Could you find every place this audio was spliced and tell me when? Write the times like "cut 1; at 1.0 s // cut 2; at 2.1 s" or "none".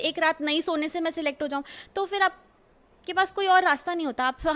none